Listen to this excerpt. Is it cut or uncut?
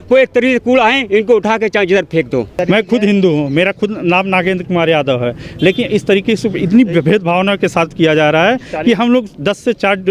cut